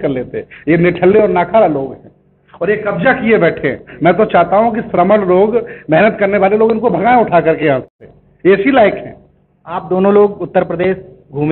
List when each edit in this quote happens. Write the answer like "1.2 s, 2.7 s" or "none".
none